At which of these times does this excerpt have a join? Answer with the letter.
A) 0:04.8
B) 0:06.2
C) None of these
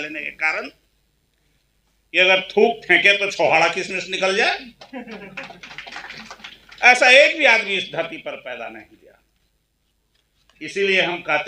C